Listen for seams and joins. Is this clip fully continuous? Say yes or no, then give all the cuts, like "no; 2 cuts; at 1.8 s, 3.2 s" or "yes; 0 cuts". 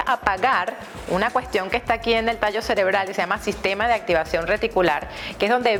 yes; 0 cuts